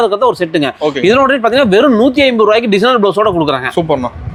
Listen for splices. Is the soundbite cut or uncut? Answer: uncut